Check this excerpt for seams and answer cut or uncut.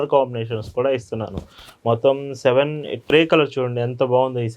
cut